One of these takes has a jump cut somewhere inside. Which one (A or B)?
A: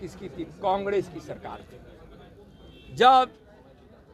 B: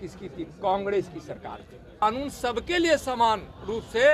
B